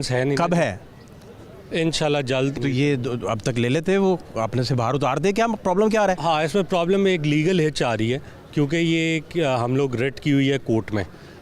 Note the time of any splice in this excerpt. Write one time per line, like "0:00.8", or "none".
0:02.6